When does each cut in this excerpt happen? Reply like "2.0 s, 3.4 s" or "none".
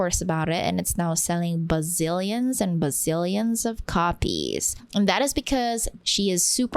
4.8 s, 5.9 s